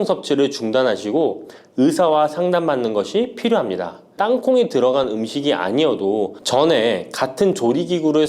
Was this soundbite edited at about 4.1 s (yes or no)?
yes